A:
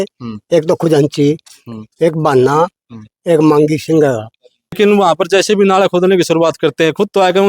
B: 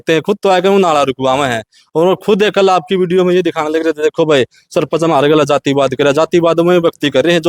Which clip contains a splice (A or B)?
A